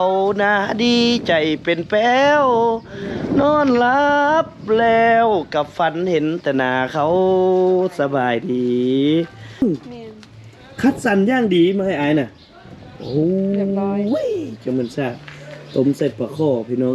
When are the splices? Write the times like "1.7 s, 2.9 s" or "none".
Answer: 9.6 s